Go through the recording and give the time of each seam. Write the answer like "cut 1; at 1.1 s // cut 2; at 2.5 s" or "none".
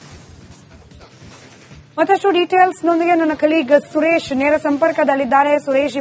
none